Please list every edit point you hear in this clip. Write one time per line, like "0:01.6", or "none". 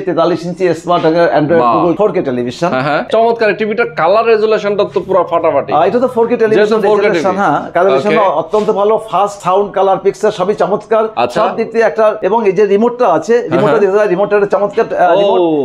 0:03.0
0:09.4
0:12.2